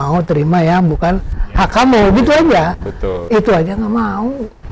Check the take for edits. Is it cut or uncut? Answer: uncut